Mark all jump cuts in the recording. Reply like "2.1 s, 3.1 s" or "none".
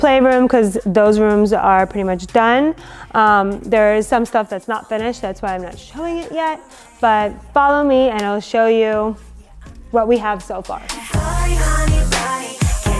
none